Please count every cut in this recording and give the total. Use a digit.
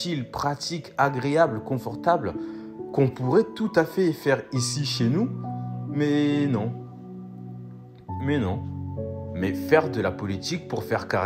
1